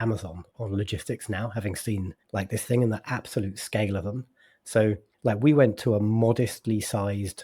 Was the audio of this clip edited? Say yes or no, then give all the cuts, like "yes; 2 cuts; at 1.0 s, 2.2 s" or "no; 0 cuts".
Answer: yes; 2 cuts; at 2.2 s, 5.1 s